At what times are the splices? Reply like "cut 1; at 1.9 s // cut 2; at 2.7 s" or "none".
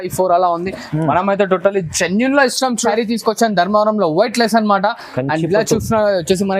cut 1; at 2.8 s